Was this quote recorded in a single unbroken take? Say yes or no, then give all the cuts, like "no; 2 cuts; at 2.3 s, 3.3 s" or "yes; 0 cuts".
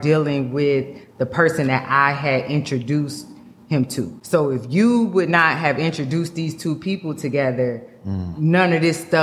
no; 1 cut; at 4.2 s